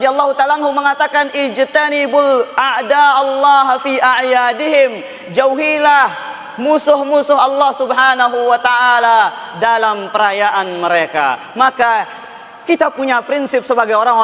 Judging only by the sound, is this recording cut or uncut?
uncut